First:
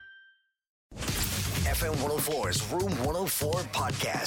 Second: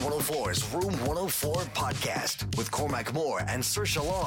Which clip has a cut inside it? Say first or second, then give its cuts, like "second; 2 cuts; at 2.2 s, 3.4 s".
first; 1 cut; at 1.0 s